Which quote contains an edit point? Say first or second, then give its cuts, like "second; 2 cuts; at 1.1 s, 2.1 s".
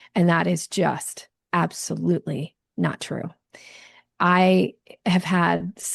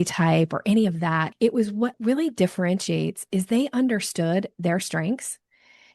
second; 1 cut; at 1.8 s